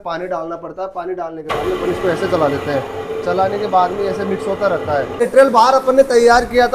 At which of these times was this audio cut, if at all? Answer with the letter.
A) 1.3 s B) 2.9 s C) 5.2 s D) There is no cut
C